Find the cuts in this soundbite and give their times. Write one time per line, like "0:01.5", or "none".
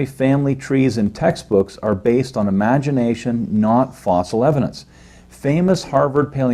0:03.0